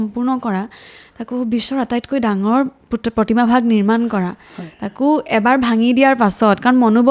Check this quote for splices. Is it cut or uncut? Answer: uncut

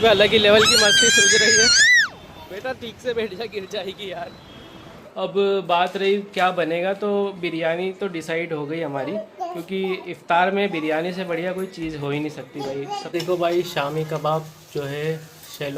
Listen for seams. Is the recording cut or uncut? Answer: cut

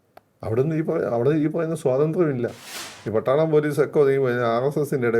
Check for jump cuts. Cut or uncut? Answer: cut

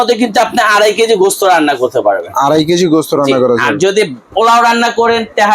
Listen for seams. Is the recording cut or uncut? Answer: uncut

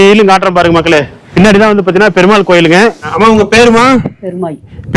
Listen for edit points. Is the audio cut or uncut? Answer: cut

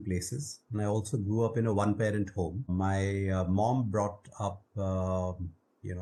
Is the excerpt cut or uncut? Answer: uncut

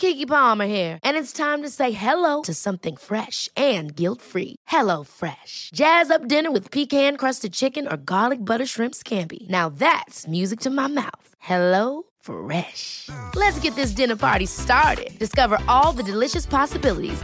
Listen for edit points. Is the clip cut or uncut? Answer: uncut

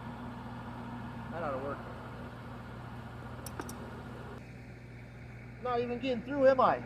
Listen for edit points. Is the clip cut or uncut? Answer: cut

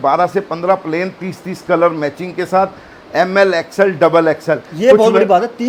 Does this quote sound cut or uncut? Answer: uncut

